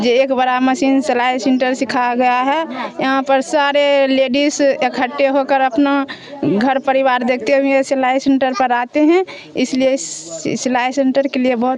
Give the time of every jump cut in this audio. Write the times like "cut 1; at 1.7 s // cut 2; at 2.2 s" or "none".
none